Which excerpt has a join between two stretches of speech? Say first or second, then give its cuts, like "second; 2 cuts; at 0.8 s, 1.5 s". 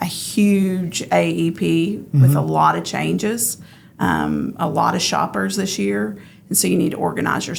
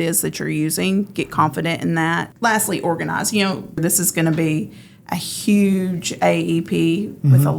second; 2 cuts; at 2.3 s, 3.8 s